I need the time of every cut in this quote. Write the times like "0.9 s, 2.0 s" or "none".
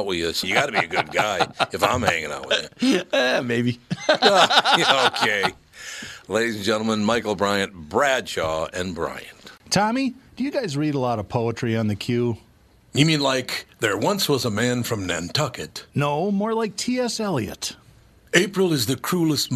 9.5 s